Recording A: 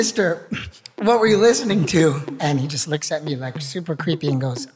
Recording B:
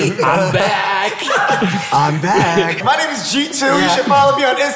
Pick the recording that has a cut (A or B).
B